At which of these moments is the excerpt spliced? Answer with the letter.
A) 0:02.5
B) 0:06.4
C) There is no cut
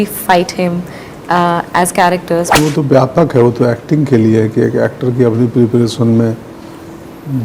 A